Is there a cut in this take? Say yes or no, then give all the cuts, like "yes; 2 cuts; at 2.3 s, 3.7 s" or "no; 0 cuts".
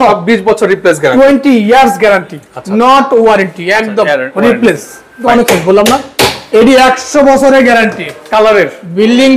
yes; 1 cut; at 5.2 s